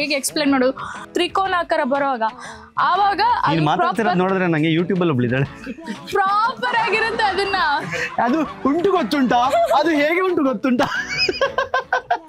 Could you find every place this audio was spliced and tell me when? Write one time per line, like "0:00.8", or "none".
0:01.0